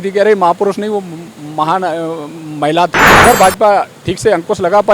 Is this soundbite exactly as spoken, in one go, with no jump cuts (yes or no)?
no